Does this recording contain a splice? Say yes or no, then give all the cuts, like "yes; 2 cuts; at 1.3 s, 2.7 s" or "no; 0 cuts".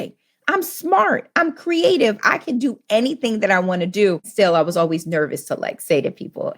yes; 1 cut; at 4.3 s